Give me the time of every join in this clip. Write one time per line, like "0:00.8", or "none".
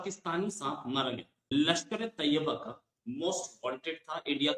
0:01.3